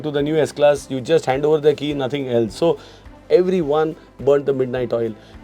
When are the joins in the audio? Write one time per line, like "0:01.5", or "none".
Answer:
0:03.0